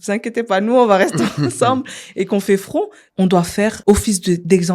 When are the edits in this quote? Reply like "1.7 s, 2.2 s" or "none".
3.0 s, 3.8 s